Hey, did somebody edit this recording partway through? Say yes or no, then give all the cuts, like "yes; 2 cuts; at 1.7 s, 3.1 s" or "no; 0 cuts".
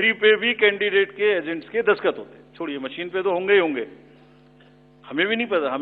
no; 0 cuts